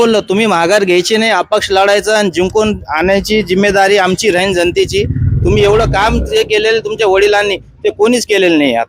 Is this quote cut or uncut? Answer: uncut